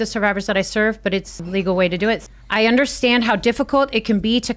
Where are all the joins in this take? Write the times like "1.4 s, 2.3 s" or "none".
1.4 s, 2.3 s